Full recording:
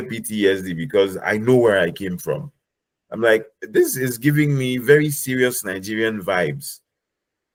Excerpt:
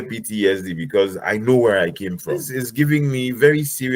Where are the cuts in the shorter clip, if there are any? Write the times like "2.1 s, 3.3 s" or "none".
2.6 s